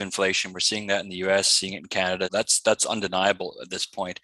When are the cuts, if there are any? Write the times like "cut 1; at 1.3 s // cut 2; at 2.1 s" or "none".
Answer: cut 1; at 2.3 s